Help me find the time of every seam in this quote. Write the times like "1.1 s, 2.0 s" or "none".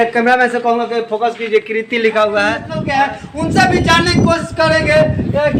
2.7 s